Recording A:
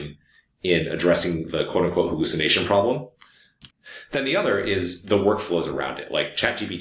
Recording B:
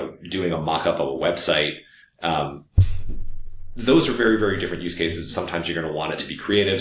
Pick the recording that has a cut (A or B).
A